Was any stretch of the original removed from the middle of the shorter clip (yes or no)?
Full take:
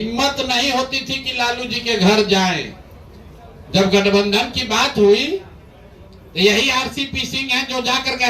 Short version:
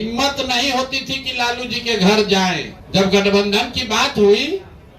yes